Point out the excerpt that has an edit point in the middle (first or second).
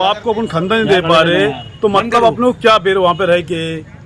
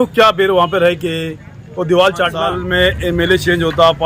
second